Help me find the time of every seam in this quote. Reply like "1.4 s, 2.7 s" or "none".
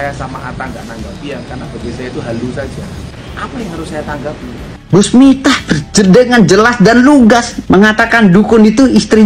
3.1 s, 4.8 s, 7.5 s